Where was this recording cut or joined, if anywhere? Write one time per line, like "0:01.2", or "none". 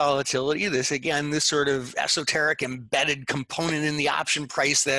none